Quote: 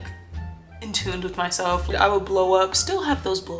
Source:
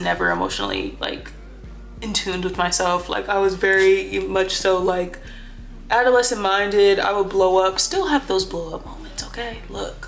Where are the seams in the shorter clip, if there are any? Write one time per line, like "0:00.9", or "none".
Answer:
0:01.9

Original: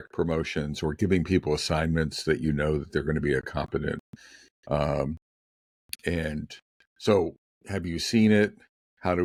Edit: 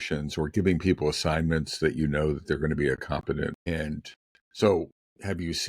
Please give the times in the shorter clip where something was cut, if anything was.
0:03.7

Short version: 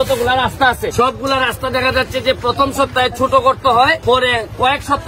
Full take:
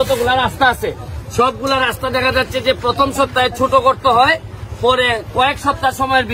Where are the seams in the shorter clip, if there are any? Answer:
0:00.9
0:04.0

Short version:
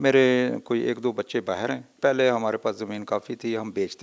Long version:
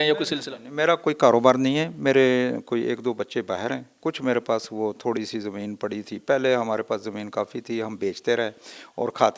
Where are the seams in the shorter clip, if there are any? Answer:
0:01.9

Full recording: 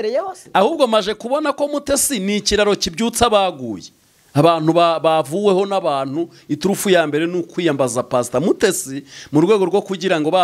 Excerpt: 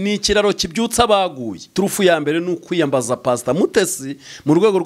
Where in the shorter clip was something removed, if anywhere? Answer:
0:01.6

